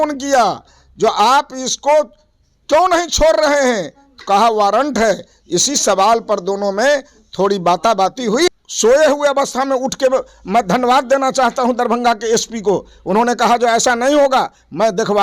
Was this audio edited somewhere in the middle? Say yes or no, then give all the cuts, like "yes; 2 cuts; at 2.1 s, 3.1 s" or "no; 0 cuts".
yes; 1 cut; at 8.6 s